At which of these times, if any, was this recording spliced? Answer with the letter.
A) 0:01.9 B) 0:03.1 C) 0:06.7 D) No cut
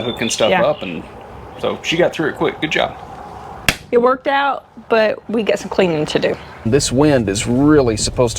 C